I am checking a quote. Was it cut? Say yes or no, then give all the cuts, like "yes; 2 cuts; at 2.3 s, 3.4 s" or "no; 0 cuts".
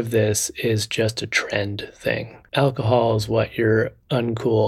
yes; 1 cut; at 2.4 s